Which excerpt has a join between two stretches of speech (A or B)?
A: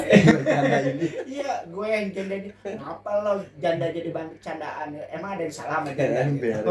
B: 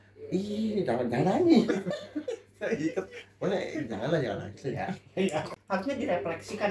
B